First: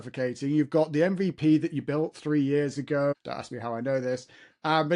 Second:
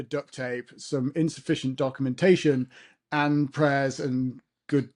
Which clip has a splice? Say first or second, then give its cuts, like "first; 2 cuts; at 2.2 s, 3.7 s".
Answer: first; 1 cut; at 3.3 s